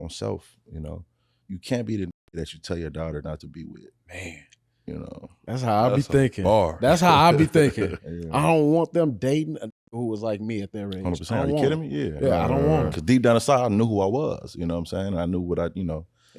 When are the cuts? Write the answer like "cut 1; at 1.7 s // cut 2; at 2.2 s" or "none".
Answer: cut 1; at 1.4 s // cut 2; at 4.0 s // cut 3; at 8.0 s